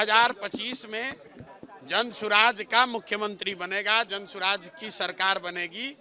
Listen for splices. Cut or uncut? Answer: uncut